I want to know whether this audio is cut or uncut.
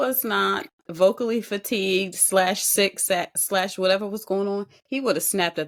uncut